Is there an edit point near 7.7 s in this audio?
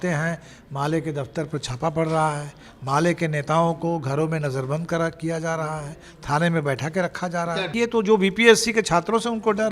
yes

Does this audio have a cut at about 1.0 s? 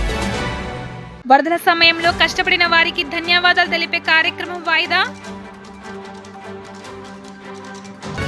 yes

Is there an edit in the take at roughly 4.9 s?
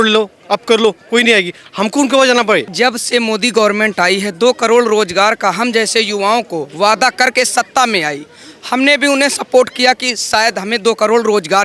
no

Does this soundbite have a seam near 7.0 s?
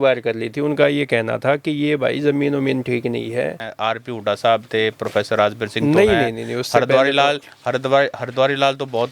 no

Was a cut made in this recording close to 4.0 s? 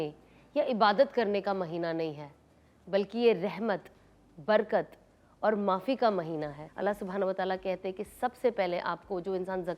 no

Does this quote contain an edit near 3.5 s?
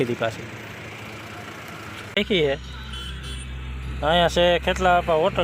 no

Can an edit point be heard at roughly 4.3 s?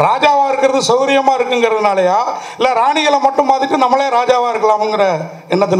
no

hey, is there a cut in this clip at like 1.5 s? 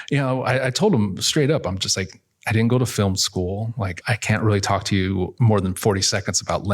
no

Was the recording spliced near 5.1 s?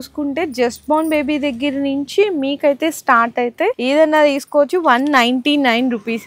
no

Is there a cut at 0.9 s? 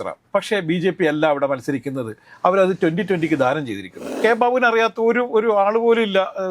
no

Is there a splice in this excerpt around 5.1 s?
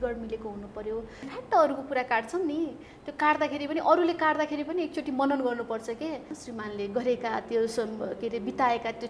no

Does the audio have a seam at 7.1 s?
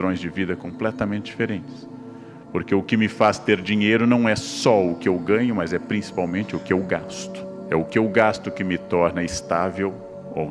yes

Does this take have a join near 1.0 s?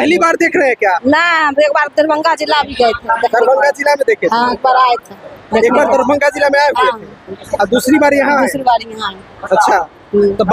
no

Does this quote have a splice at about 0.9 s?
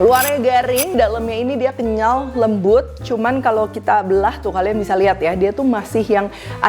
yes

